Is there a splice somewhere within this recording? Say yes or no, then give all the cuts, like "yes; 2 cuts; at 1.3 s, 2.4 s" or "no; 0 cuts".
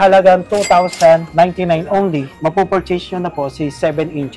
yes; 2 cuts; at 1.3 s, 2.3 s